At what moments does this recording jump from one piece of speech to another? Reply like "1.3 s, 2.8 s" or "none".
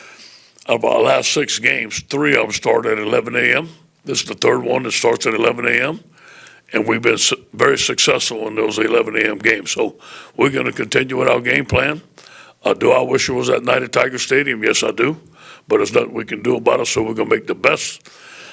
none